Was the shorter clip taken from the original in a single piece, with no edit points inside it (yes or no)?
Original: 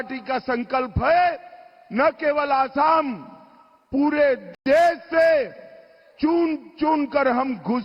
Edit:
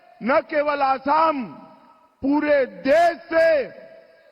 no